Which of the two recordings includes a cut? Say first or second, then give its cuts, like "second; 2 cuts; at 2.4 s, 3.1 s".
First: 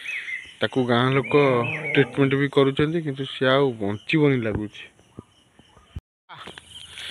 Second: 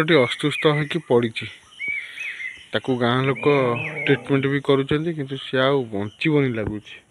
first; 1 cut; at 6.0 s